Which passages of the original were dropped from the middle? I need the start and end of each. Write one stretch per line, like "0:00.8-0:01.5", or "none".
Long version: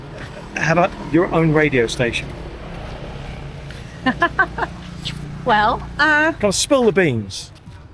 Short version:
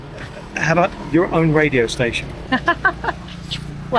0:02.3-0:03.9